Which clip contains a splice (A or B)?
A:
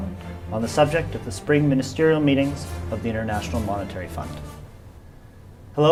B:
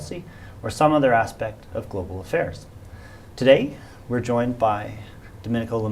B